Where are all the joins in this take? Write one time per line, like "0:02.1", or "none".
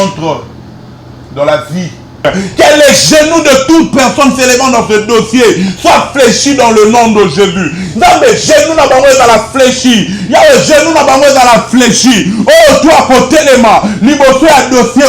0:02.2